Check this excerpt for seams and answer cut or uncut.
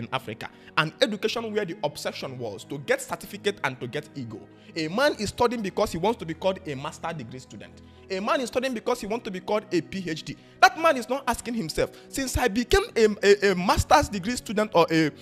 uncut